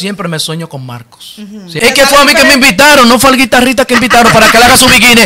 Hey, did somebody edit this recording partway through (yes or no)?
yes